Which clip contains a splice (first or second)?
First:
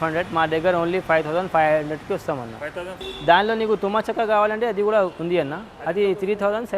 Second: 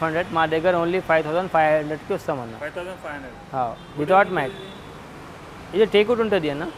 first